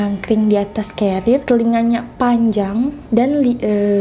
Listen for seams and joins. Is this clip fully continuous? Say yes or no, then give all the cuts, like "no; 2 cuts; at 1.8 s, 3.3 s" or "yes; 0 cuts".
no; 2 cuts; at 1.4 s, 3.0 s